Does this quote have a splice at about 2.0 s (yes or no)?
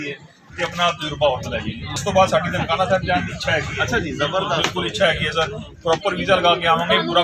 yes